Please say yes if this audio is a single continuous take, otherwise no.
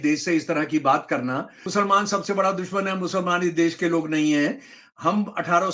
no